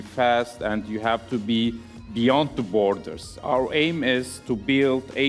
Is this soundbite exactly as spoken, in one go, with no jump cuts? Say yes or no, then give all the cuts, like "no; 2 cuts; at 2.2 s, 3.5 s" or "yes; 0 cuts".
no; 1 cut; at 3.4 s